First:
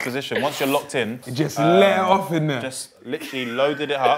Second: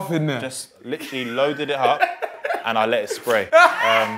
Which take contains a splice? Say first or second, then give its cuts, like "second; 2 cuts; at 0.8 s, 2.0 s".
first; 1 cut; at 1.3 s